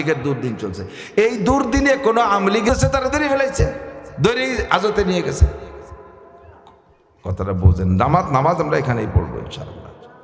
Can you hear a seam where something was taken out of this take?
yes; 1 cut; at 2.7 s

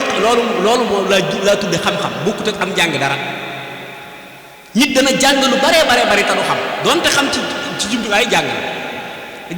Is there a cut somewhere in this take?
no; 0 cuts

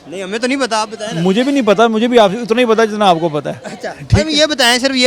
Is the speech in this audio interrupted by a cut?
no; 0 cuts

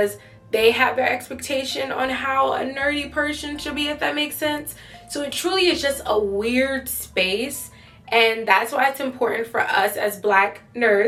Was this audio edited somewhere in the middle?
no; 0 cuts

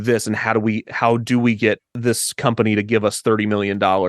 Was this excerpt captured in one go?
no; 1 cut; at 1.9 s

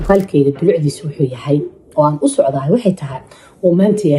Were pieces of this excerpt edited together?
no; 0 cuts

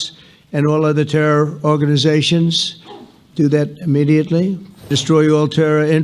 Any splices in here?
yes; 1 cut; at 5.0 s

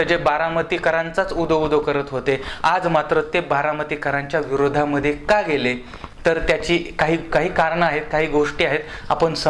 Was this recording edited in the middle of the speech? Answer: no; 0 cuts

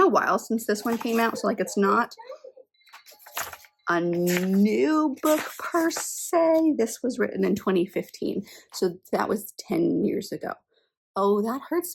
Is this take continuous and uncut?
yes; 0 cuts

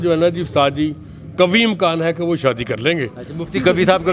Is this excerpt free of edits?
yes; 0 cuts

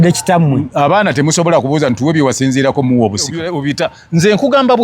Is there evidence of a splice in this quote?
yes; 1 cut; at 3.5 s

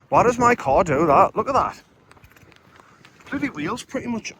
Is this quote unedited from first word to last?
yes; 0 cuts

